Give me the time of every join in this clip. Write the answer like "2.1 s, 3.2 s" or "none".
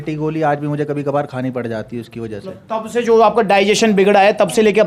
none